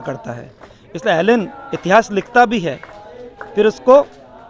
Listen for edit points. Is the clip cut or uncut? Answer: uncut